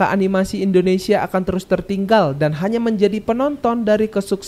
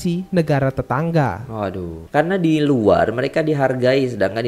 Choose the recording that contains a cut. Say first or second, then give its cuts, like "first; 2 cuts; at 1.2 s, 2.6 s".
second; 1 cut; at 2.0 s